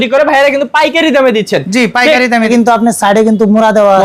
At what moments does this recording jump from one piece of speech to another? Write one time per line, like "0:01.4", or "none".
0:02.5